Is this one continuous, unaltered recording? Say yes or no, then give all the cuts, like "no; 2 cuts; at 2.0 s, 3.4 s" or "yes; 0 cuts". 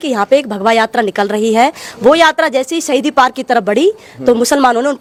yes; 0 cuts